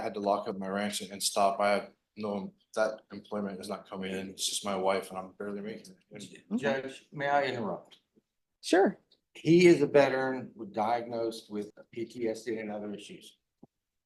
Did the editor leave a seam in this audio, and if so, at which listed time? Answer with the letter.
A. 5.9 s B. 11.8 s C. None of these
B